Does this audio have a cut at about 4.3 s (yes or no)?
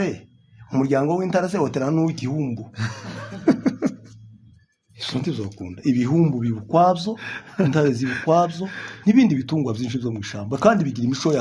no